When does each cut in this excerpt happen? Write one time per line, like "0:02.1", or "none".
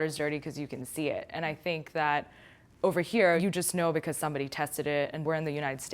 0:03.4
0:05.2